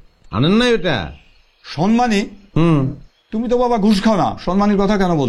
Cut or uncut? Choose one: uncut